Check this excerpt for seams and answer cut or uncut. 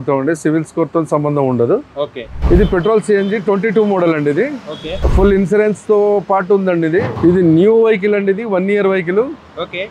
cut